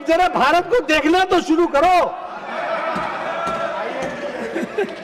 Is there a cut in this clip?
no; 0 cuts

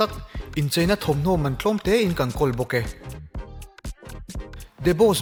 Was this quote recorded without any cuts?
yes; 0 cuts

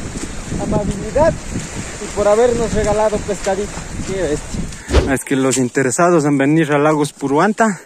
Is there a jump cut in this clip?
yes; 1 cut; at 4.7 s

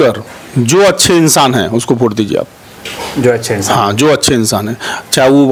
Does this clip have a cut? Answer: no; 0 cuts

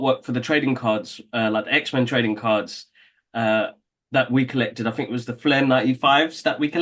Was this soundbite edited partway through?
no; 0 cuts

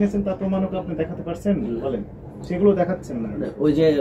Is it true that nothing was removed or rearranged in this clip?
yes; 0 cuts

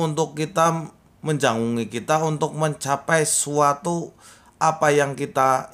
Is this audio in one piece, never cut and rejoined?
yes; 0 cuts

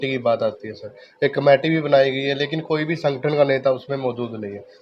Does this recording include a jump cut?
no; 0 cuts

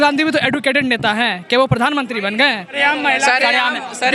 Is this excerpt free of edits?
no; 1 cut; at 2.8 s

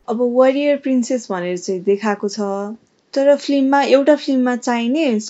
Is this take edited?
no; 0 cuts

